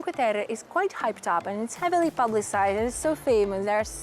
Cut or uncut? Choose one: uncut